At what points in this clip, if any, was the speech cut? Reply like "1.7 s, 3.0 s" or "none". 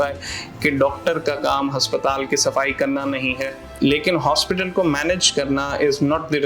3.6 s